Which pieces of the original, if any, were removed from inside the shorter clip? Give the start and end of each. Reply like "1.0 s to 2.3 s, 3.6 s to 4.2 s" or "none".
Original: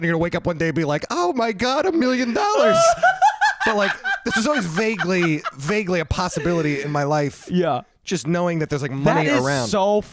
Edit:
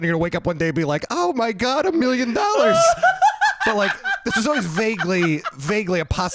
none